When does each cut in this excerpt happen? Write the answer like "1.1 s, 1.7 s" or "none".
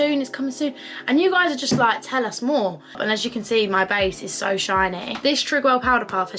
3.0 s, 5.1 s